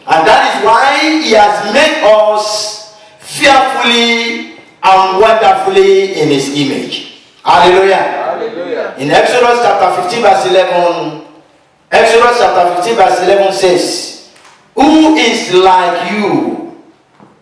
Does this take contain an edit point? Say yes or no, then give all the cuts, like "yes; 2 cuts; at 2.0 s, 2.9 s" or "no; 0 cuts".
no; 0 cuts